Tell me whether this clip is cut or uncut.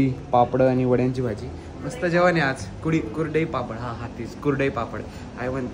uncut